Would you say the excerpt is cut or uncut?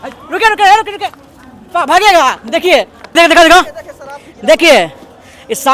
cut